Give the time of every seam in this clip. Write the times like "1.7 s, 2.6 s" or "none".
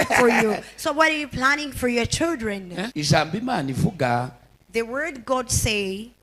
2.9 s